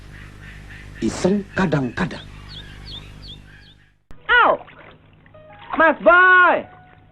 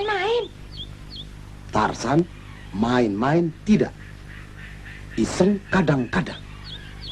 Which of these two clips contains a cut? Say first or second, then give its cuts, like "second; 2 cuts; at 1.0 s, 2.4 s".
first; 1 cut; at 4.2 s